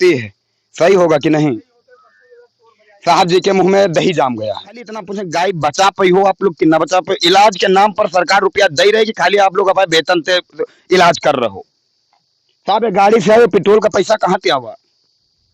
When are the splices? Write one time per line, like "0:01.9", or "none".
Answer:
0:05.1